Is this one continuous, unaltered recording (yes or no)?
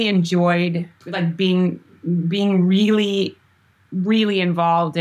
no